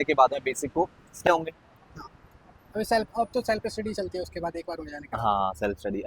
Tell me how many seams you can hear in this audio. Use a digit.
1